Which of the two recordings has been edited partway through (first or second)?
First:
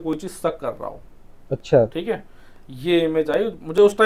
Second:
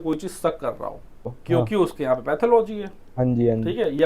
second